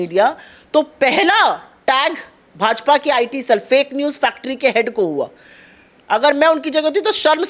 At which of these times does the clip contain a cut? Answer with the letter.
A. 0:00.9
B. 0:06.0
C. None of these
C